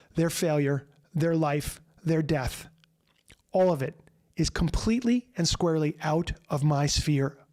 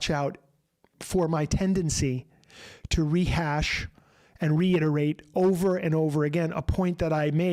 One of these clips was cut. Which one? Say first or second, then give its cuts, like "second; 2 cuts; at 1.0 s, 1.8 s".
second; 1 cut; at 0.9 s